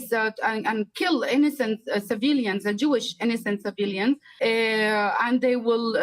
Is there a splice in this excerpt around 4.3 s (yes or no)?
yes